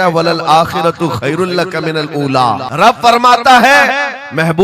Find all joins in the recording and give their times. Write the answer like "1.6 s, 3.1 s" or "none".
2.7 s